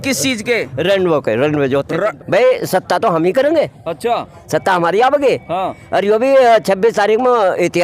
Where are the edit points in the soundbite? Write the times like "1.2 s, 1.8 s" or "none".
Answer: 2.2 s